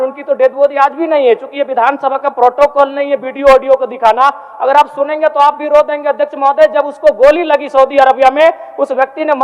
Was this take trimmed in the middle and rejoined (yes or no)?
no